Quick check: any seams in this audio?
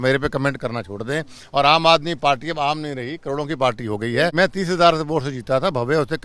yes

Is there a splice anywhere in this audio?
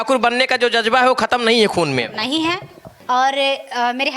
yes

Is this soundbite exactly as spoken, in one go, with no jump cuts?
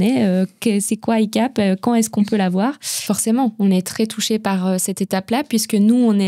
no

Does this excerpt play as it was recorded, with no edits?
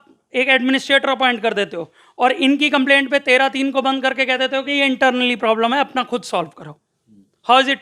yes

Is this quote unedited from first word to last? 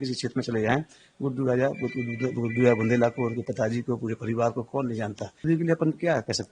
no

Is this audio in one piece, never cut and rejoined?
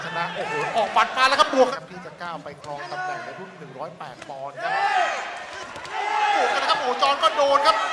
no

